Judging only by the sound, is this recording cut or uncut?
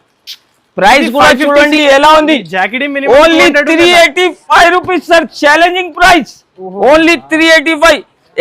cut